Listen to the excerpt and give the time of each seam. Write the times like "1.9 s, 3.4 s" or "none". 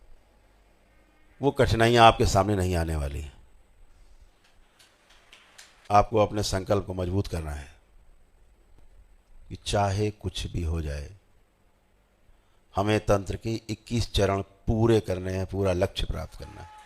5.9 s